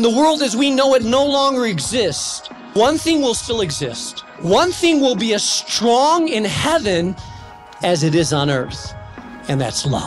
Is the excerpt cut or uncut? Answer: cut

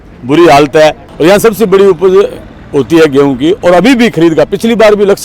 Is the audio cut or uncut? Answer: cut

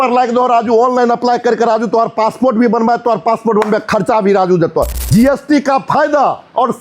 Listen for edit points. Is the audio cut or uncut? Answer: cut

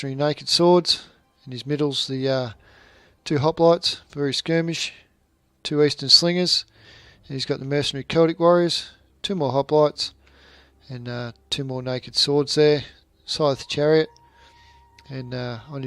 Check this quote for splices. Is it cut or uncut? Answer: cut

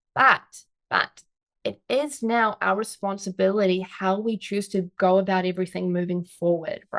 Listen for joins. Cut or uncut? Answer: uncut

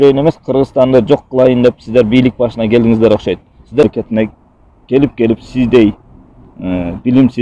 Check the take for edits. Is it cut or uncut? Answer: cut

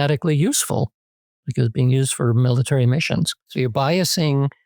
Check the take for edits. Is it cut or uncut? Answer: cut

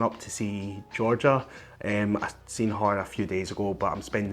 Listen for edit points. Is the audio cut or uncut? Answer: uncut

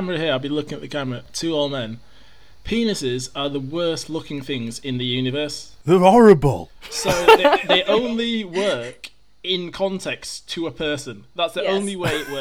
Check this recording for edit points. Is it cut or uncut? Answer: cut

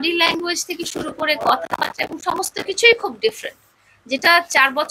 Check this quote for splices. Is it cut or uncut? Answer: uncut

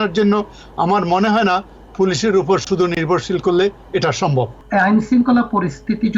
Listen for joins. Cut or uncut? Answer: cut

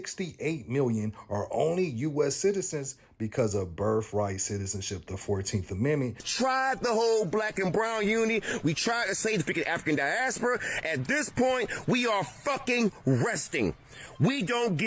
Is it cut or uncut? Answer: cut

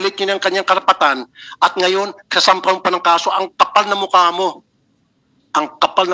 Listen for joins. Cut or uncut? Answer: uncut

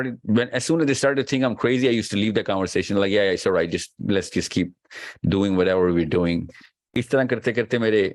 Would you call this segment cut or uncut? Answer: uncut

